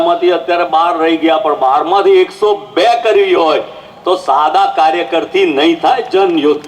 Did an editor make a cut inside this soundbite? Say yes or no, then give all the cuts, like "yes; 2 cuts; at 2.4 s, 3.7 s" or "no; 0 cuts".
no; 0 cuts